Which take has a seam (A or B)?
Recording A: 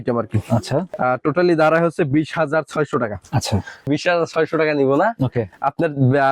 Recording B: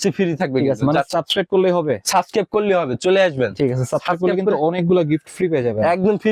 A